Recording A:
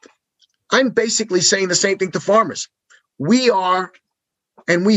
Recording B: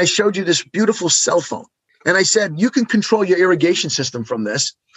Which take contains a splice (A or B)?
B